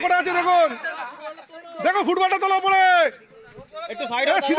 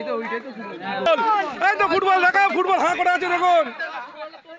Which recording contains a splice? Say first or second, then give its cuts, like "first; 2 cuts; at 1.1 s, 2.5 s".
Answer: second; 1 cut; at 1.1 s